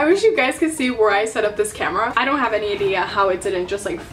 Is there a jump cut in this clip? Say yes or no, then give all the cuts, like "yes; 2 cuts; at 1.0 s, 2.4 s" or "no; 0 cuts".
yes; 1 cut; at 2.1 s